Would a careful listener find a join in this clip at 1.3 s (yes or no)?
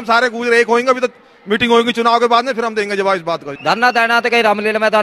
no